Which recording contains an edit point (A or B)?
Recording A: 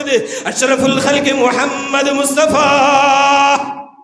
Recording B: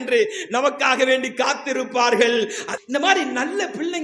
B